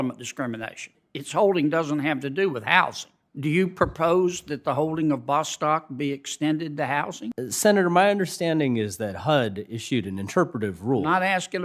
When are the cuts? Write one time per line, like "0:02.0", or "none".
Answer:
0:01.0
0:07.3